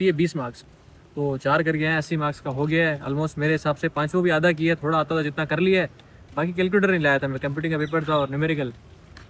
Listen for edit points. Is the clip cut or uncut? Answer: uncut